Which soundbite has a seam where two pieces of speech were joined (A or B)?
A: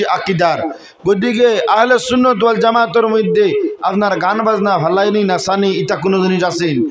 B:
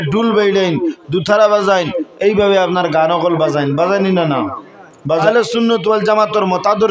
B